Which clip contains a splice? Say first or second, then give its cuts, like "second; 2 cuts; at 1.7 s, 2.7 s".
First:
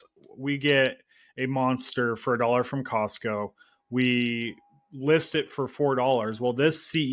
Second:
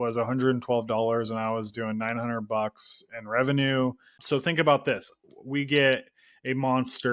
second; 1 cut; at 4.1 s